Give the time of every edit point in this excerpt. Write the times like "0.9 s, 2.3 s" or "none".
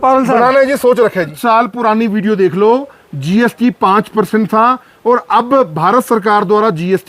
1.3 s